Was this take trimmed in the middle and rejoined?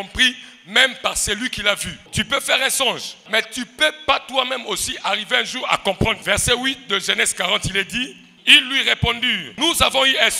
yes; 5 cuts; at 2.1 s, 3.2 s, 6.2 s, 8.3 s, 9.5 s

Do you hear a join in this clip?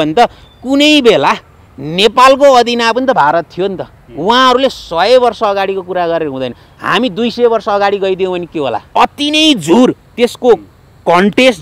yes; 1 cut; at 8.8 s

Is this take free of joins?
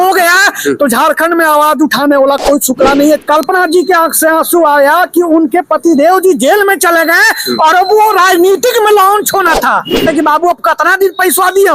no; 2 cuts; at 3.2 s, 10.1 s

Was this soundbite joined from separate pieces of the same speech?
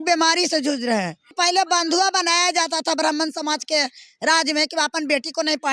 yes; 1 cut; at 1.2 s

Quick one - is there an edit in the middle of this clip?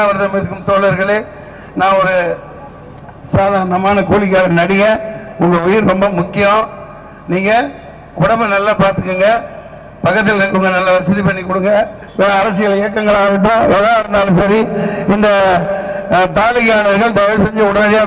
yes; 1 cut; at 12.0 s

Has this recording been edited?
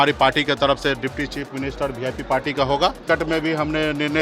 yes; 1 cut; at 3.0 s

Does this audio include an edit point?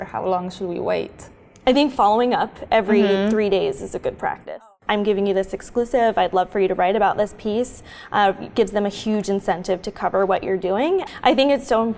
yes; 2 cuts; at 4.5 s, 11.1 s

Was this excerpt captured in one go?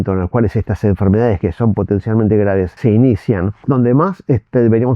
no; 2 cuts; at 2.7 s, 3.6 s

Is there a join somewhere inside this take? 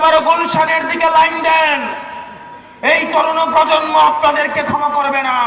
no; 0 cuts

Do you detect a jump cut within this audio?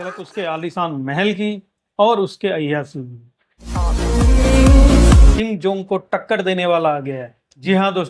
yes; 1 cut; at 5.3 s

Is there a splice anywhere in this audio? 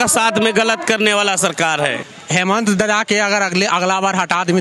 yes; 1 cut; at 2.0 s

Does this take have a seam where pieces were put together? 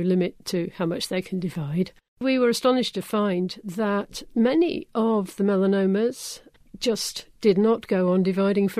yes; 1 cut; at 2.0 s

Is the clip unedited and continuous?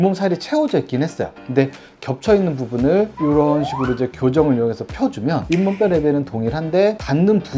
no; 1 cut; at 1.3 s

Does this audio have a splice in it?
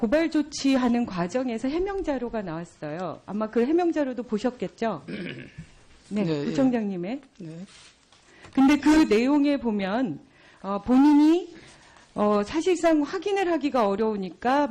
yes; 1 cut; at 5.2 s

